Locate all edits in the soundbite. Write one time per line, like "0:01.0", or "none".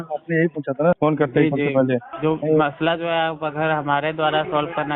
0:01.0
0:02.1